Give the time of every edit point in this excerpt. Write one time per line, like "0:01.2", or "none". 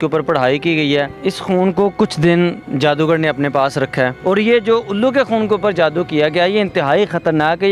0:01.1
0:04.2